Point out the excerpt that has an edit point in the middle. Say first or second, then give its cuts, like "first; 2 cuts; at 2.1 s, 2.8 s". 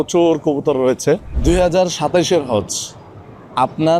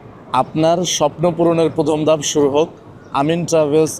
first; 1 cut; at 1.3 s